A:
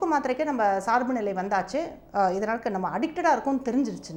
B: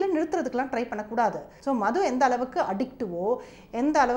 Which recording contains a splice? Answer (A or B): B